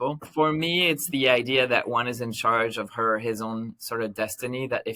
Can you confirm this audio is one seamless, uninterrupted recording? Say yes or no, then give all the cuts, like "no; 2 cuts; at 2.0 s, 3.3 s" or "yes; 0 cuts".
yes; 0 cuts